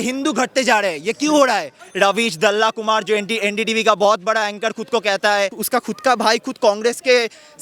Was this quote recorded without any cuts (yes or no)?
no